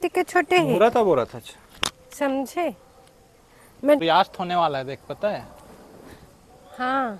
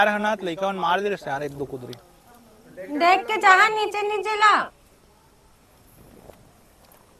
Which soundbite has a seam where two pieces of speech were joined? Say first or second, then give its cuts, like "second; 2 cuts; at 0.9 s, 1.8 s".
first; 1 cut; at 4.0 s